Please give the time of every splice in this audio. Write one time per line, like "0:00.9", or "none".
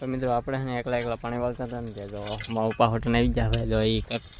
none